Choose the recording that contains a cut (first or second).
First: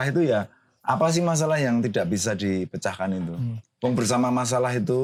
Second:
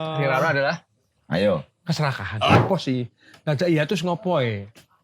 second